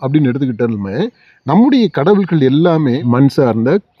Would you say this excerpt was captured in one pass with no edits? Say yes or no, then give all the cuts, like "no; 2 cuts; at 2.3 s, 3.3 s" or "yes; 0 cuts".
no; 1 cut; at 3.0 s